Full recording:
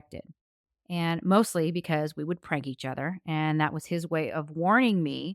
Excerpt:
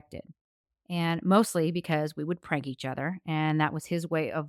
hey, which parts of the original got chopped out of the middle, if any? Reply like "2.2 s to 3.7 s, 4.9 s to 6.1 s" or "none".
none

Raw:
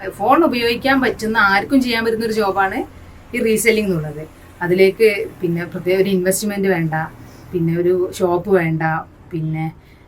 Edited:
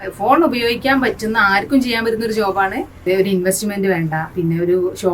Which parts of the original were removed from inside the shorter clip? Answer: 2.9 s to 5.7 s, 7.0 s to 7.4 s

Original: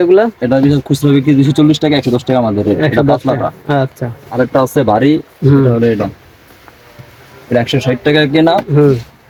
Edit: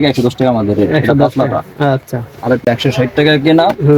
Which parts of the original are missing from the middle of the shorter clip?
4.5 s to 7.5 s

